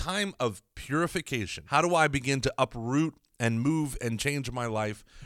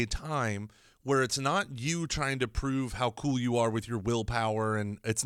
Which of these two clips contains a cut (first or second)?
first